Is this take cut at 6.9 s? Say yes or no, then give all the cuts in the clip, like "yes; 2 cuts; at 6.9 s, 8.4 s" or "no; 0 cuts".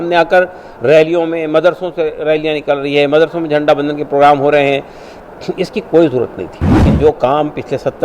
yes; 1 cut; at 6.9 s